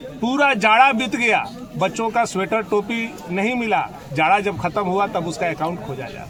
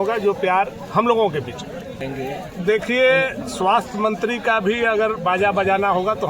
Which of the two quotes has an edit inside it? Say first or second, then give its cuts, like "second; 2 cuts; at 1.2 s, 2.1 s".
second; 1 cut; at 2.0 s